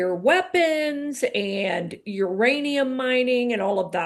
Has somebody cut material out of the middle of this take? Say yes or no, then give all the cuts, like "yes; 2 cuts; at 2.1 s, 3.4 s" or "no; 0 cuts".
no; 0 cuts